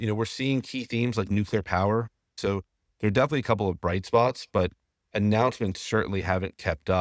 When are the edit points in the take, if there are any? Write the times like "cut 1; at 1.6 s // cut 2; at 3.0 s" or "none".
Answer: cut 1; at 2.4 s

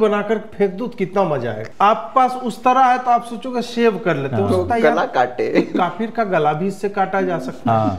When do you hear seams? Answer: cut 1; at 1.6 s

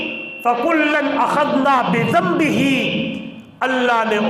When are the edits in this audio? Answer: none

